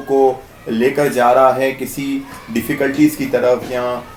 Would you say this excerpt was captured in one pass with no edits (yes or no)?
yes